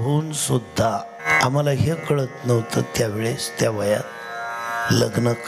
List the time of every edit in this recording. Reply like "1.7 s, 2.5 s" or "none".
1.3 s